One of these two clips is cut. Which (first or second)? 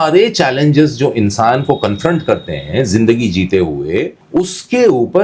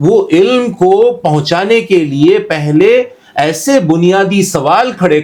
first